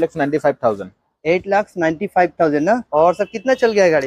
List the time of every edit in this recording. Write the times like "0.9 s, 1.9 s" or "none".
2.9 s